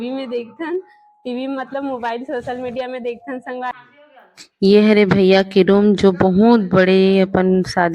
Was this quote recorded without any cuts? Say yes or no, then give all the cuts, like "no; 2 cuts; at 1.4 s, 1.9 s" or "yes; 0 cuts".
no; 1 cut; at 3.7 s